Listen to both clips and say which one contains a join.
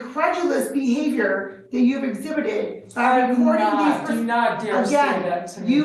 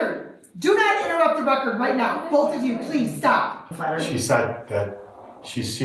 second; 1 cut; at 3.7 s

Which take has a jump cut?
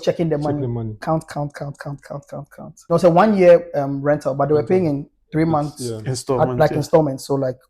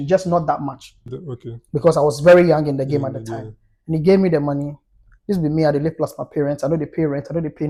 first; 1 cut; at 2.9 s

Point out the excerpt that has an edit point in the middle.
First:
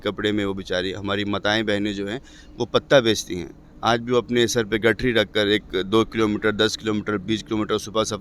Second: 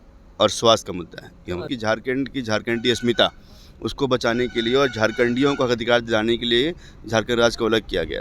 second; 1 cut; at 1.7 s

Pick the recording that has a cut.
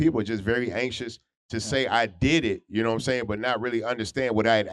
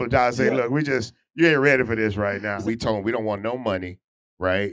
second; 1 cut; at 2.6 s

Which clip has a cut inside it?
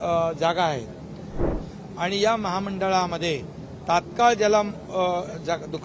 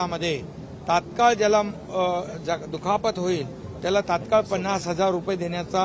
first; 1 cut; at 1.5 s

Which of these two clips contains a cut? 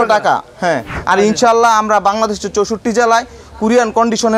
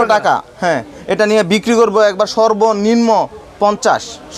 first; 1 cut; at 0.9 s

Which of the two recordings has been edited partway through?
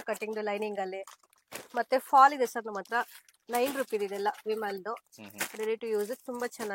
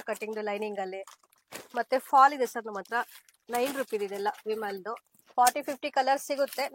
second; 1 cut; at 5.1 s

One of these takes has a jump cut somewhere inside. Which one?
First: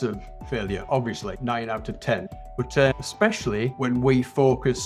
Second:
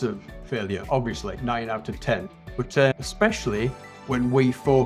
first; 1 cut; at 3.7 s

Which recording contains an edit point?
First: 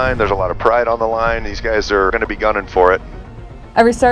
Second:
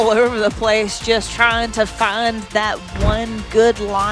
first; 2 cuts; at 2.1 s, 3.2 s

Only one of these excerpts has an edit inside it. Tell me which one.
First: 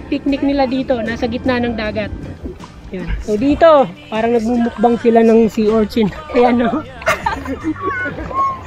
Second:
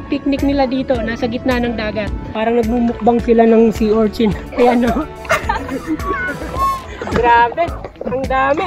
second; 1 cut; at 2.3 s

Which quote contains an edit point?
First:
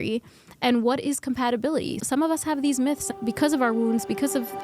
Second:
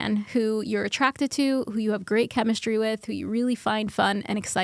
first; 2 cuts; at 2.0 s, 3.0 s

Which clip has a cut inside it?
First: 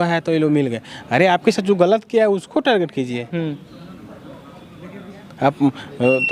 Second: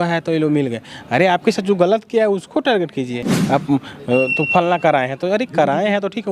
second; 1 cut; at 3.3 s

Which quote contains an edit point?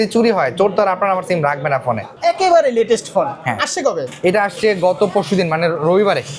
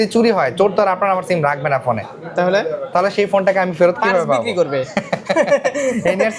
first; 1 cut; at 2.1 s

